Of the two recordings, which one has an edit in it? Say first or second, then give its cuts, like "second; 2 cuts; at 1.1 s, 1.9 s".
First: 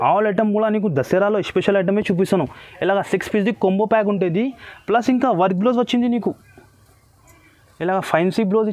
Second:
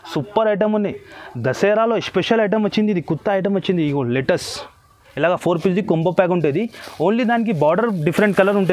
second; 1 cut; at 5.0 s